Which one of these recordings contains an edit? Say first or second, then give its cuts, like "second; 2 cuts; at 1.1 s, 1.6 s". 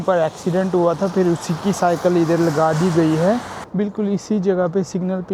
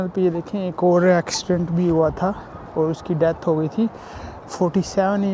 first; 1 cut; at 3.6 s